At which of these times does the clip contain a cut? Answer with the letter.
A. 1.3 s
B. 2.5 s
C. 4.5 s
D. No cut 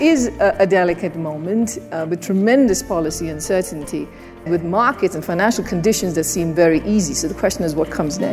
C